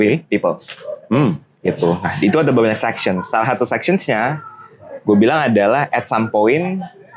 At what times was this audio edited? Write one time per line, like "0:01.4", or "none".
none